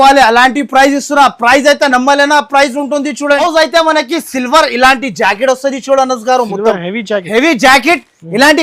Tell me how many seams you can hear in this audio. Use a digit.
0